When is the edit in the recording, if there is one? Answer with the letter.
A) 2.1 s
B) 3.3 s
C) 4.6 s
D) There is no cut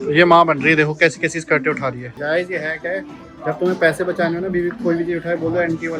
A